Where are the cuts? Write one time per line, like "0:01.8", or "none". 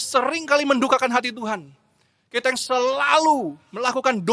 none